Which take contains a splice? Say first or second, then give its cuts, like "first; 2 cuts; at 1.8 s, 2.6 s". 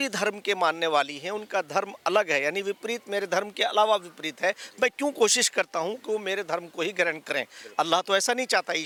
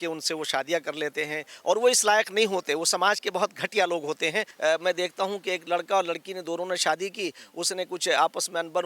second; 1 cut; at 4.5 s